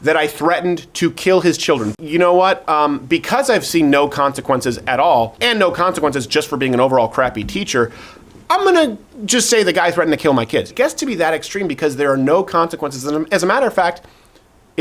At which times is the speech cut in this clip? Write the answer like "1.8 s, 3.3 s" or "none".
1.9 s, 5.4 s, 10.7 s